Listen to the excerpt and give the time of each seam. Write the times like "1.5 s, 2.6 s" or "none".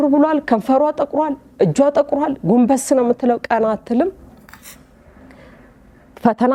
none